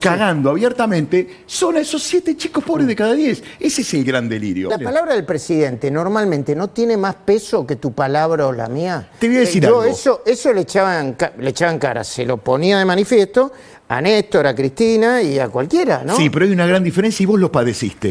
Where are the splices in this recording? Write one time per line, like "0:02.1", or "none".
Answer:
0:04.8